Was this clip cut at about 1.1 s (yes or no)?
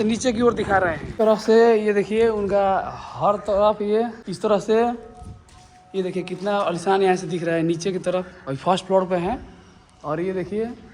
yes